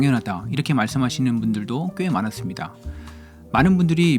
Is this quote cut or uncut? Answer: uncut